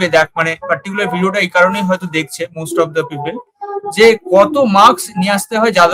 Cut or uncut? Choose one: uncut